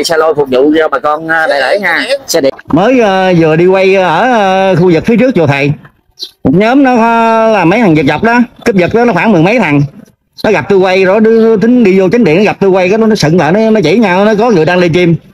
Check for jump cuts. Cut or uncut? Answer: cut